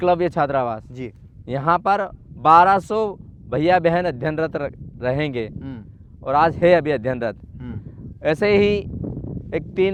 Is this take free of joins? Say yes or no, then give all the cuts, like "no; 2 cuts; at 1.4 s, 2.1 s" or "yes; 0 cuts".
yes; 0 cuts